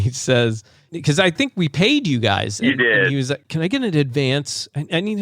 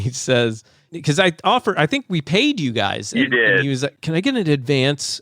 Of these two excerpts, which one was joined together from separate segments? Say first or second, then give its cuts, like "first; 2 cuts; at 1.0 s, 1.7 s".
first; 1 cut; at 1.4 s